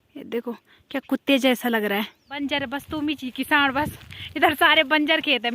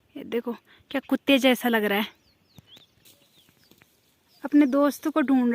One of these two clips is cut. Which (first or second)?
first